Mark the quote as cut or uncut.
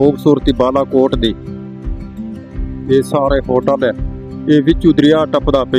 uncut